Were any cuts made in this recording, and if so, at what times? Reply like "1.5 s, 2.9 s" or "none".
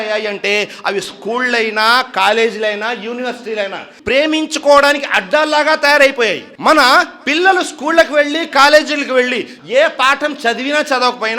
3.9 s, 9.5 s